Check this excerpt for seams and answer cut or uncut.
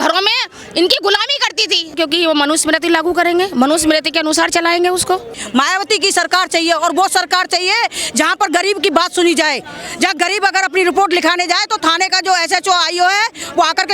cut